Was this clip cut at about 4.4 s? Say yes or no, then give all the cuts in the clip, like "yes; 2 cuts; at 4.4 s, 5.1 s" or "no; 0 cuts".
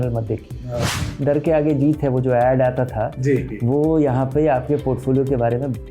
no; 1 cut; at 1.1 s